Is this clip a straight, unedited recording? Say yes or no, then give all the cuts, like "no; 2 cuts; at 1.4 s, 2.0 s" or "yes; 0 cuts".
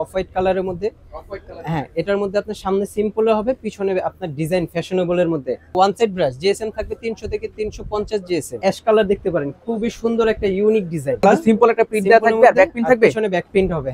no; 3 cuts; at 5.8 s, 8.6 s, 11.2 s